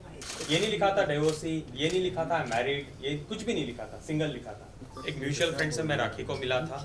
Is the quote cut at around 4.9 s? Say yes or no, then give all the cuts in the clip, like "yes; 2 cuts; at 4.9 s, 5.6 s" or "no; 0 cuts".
yes; 1 cut; at 4.9 s